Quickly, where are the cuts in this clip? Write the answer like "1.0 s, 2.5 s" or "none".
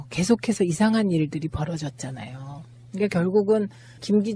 none